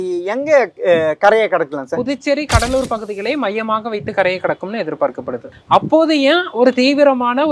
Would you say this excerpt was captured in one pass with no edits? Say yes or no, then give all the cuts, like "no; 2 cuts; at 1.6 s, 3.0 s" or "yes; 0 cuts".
no; 1 cut; at 5.5 s